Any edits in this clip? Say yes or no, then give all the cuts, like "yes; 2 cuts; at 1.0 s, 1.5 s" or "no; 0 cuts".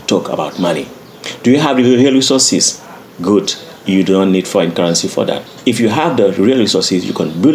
yes; 1 cut; at 5.5 s